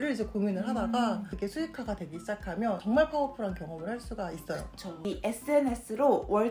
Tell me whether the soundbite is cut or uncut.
cut